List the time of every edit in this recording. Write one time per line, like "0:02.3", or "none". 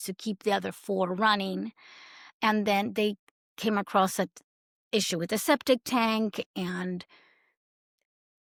none